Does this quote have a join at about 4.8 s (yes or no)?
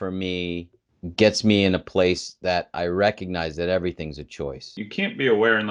yes